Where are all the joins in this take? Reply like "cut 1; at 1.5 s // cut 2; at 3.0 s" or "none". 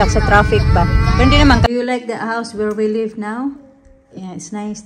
cut 1; at 1.7 s